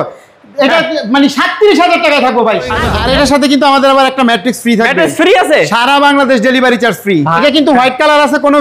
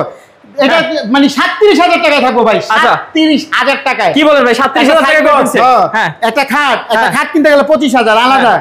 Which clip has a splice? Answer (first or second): first